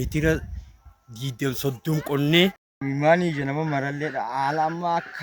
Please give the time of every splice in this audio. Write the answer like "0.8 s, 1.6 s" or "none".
2.7 s